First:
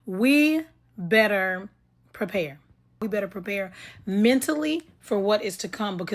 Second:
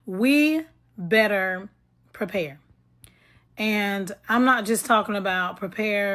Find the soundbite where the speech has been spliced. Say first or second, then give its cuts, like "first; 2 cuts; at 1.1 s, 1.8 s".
first; 1 cut; at 3.0 s